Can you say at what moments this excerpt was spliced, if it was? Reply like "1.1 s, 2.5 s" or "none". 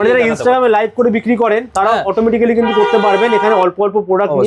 none